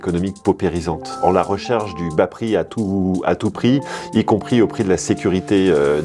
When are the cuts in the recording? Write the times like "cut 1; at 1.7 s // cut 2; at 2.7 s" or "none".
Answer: cut 1; at 1.1 s